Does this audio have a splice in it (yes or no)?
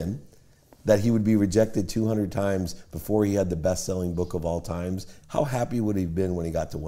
yes